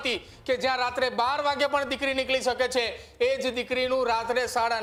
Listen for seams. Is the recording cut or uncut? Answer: uncut